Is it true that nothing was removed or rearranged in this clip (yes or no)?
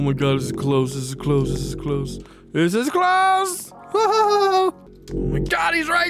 no